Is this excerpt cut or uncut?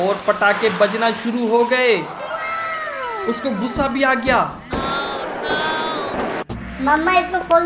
cut